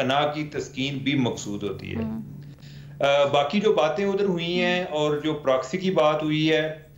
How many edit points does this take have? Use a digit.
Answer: 0